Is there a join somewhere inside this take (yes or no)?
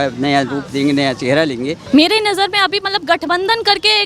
yes